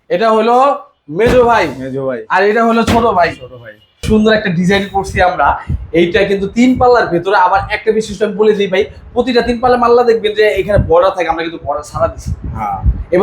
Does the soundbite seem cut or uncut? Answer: cut